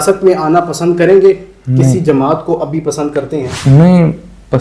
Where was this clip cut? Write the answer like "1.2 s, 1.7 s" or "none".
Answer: 3.5 s